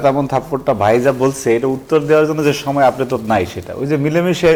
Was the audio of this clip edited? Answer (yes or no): no